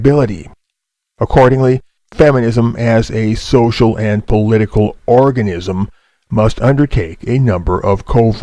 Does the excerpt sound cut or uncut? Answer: cut